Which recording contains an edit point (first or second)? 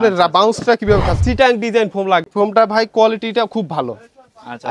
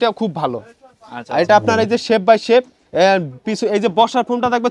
first